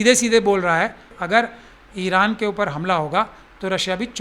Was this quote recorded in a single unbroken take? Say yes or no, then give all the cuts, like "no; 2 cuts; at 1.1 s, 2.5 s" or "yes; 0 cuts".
no; 1 cut; at 1.1 s